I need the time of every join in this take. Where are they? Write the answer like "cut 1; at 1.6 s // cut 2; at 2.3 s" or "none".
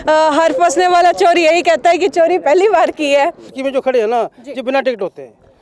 cut 1; at 3.6 s